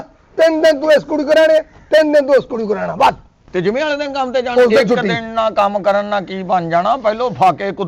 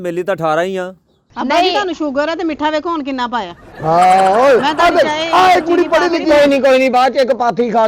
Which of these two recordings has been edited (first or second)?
second